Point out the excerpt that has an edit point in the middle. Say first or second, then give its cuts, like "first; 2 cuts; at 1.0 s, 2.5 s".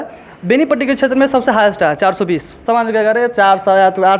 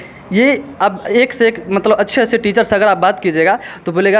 first; 1 cut; at 2.6 s